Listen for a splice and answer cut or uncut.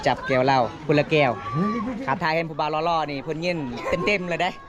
uncut